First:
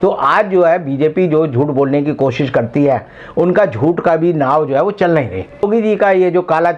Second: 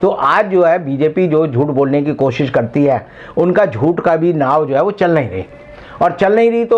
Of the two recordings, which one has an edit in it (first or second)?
first